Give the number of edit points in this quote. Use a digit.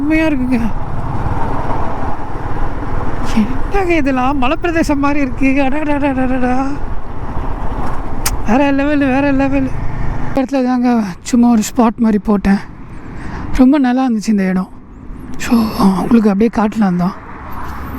1